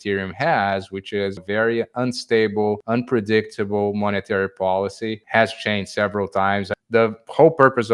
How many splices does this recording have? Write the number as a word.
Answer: four